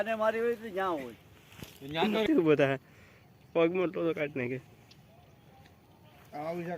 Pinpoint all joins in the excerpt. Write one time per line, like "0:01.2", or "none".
0:02.2